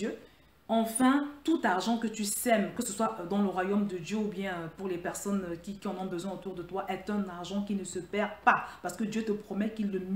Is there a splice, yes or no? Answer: no